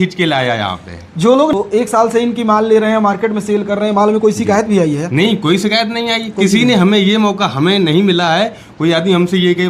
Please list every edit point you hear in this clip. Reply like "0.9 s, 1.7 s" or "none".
1.5 s